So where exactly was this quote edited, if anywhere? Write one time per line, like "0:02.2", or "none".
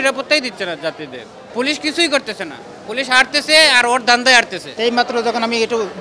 0:01.4
0:04.6